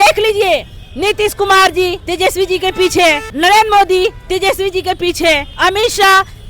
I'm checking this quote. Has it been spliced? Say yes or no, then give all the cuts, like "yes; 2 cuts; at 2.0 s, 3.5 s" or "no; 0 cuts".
yes; 3 cuts; at 2.0 s, 3.3 s, 5.5 s